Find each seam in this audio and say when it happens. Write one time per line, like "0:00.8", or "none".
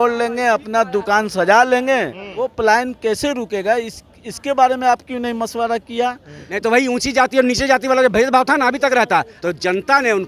0:02.5
0:06.4
0:09.3